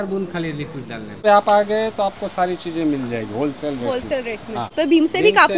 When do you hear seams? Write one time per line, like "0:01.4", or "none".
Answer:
0:01.2
0:04.7